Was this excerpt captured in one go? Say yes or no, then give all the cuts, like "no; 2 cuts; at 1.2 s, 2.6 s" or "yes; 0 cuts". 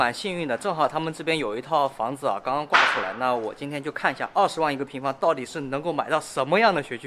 yes; 0 cuts